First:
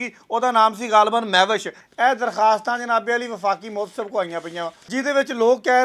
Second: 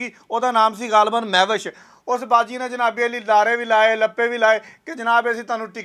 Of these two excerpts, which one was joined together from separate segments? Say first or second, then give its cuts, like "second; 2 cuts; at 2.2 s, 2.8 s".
first; 2 cuts; at 1.8 s, 4.8 s